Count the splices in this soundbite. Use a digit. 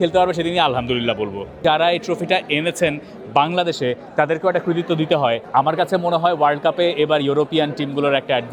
2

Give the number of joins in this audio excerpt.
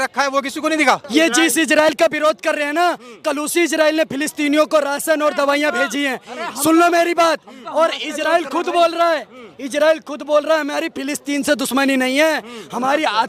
1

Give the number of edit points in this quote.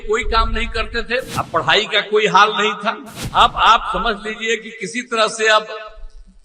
2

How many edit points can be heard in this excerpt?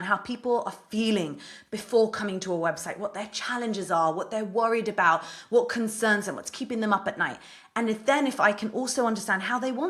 0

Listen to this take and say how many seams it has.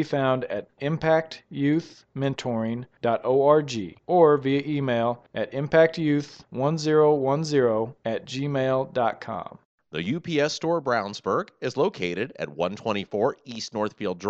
1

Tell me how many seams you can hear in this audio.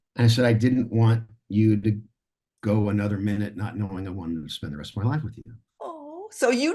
0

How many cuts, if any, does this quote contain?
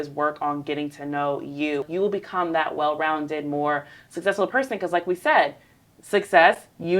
1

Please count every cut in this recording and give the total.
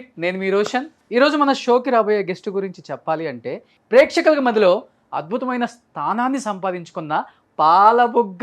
1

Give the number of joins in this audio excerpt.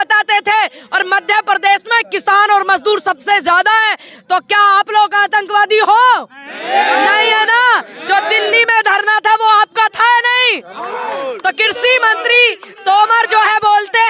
0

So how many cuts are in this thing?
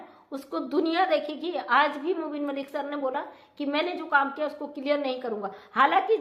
0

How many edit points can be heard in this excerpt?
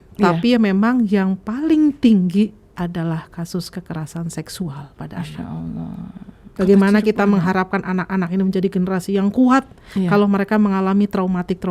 1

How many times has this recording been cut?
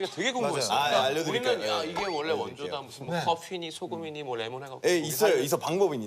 1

